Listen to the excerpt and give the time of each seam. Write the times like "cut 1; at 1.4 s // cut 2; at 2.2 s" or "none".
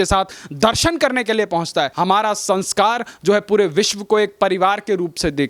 cut 1; at 1.9 s

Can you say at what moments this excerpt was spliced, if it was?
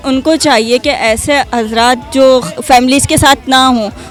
none

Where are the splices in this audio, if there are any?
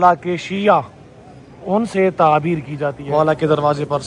cut 1; at 3.0 s

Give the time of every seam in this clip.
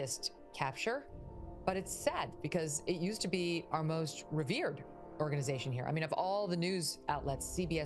none

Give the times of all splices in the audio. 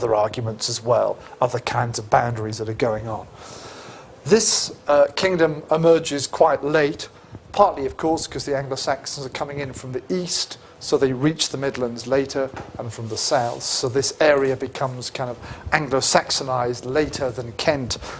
none

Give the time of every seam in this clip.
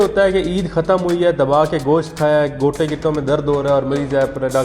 none

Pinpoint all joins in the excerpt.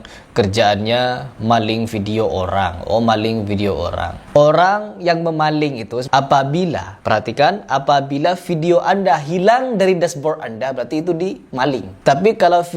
cut 1; at 6.0 s

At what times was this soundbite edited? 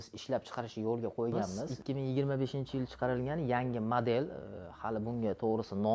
cut 1; at 1.7 s

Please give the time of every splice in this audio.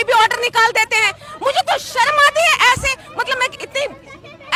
none

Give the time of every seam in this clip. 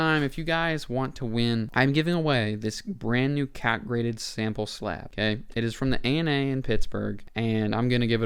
cut 1; at 1.7 s // cut 2; at 5.1 s // cut 3; at 7.2 s

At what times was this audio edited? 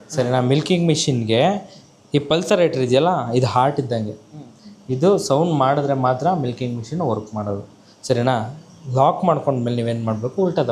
none

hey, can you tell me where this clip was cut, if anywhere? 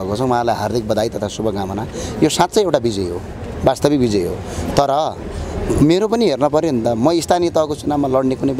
none

